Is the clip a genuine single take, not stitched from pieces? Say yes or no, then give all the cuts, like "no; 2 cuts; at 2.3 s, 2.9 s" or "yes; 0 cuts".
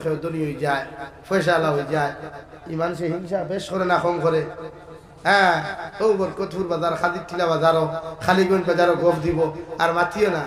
yes; 0 cuts